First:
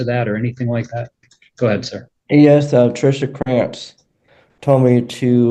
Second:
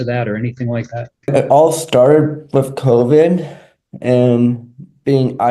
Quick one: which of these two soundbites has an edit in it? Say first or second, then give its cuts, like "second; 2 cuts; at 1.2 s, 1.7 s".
second; 1 cut; at 1.3 s